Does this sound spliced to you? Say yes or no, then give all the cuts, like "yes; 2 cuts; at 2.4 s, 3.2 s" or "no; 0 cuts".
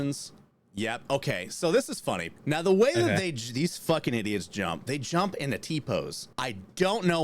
yes; 2 cuts; at 2.3 s, 6.2 s